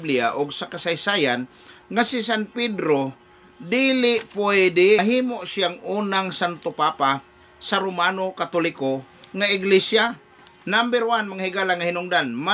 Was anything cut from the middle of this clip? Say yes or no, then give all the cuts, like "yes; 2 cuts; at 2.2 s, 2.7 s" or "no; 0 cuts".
yes; 1 cut; at 5.0 s